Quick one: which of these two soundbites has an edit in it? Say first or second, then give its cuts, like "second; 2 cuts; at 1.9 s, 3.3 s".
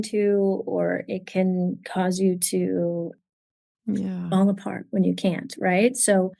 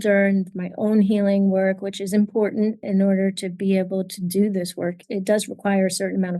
second; 2 cuts; at 2.8 s, 5.0 s